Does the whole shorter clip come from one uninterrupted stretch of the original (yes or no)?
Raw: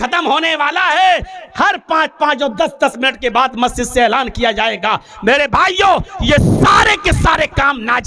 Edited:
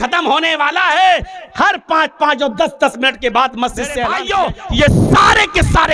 no